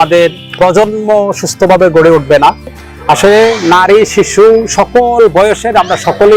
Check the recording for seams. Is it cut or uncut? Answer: cut